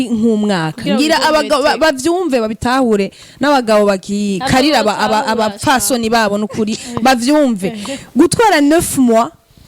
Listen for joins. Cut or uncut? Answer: uncut